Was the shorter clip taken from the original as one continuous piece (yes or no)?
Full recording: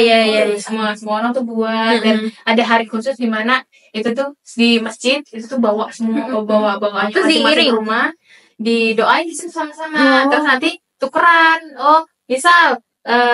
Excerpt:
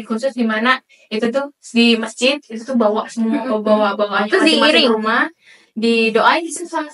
yes